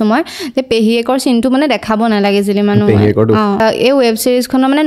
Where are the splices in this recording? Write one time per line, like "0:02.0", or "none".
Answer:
0:03.6